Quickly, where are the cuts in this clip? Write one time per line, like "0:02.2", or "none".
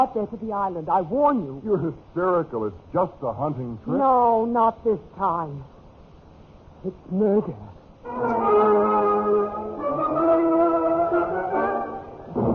0:06.1